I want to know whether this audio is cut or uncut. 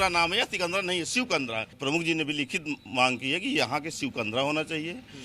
cut